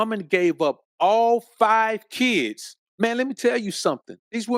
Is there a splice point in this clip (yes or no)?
yes